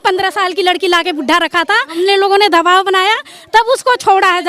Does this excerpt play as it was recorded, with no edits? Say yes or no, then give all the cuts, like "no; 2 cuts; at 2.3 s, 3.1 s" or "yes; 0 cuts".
no; 1 cut; at 1.9 s